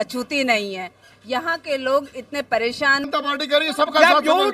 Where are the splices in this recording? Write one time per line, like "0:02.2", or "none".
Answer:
0:03.1